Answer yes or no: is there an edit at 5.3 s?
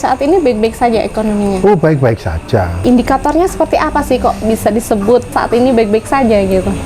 yes